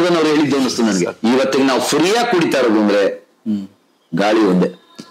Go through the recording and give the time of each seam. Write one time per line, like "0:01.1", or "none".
0:01.1